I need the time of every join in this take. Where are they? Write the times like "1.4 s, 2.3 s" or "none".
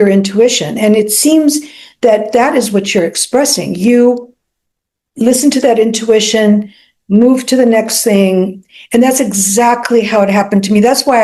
none